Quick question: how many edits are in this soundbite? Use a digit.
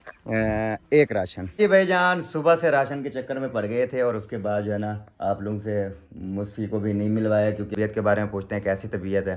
2